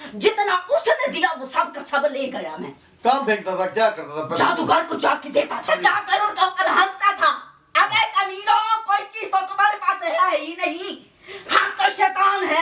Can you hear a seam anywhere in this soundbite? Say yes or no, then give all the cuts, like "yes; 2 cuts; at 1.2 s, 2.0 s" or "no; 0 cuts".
yes; 1 cut; at 5.7 s